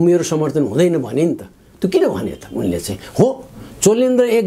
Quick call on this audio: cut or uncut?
uncut